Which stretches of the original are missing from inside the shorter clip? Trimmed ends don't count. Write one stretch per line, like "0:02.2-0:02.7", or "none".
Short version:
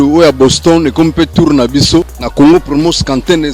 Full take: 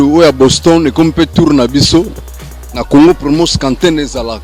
0:02.2-0:02.7